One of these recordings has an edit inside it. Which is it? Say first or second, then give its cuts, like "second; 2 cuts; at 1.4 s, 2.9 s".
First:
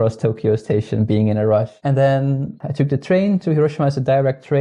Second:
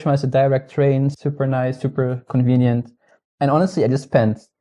first; 1 cut; at 1.7 s